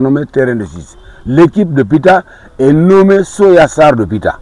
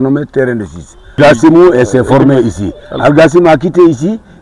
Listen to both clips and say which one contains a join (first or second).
second